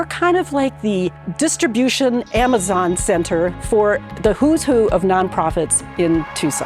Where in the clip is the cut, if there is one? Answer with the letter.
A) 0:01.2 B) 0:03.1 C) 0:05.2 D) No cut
A